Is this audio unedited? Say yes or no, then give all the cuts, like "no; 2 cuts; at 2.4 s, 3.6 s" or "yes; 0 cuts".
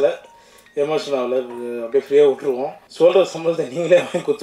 no; 1 cut; at 2.8 s